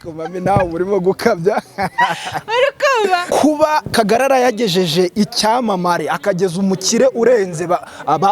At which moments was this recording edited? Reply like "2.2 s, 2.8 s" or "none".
3.3 s